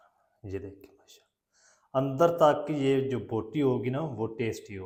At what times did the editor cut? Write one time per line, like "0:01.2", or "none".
none